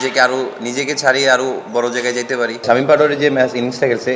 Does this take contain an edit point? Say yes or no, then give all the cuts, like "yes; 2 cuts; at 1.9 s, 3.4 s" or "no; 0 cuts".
yes; 1 cut; at 2.6 s